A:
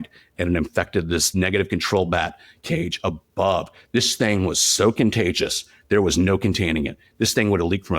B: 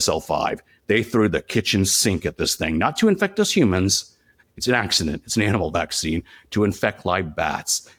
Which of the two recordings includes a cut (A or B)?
A